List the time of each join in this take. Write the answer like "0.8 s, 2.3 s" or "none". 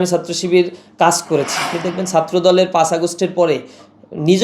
1.6 s